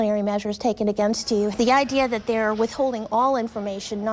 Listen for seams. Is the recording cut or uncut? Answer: cut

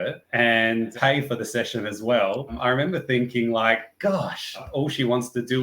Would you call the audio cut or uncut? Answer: cut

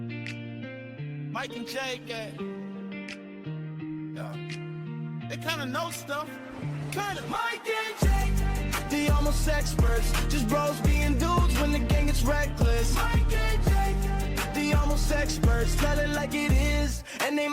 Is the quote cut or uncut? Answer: uncut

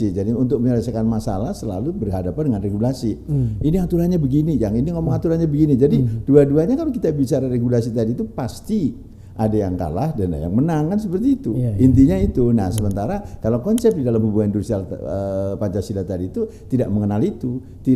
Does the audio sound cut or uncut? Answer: uncut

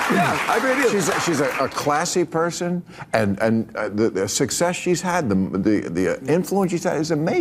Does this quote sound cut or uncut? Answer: uncut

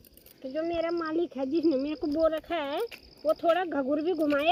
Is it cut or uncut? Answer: uncut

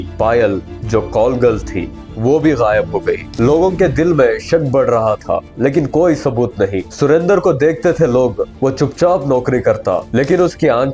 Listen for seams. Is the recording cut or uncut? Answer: uncut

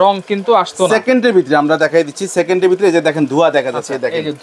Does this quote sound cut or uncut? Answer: uncut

